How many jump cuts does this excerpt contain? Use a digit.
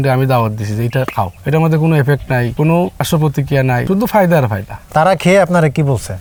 0